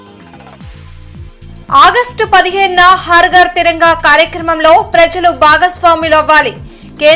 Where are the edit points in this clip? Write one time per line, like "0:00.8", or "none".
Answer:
0:01.2